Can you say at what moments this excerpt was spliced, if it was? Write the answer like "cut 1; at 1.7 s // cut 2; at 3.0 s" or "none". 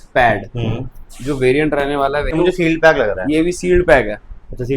cut 1; at 2.4 s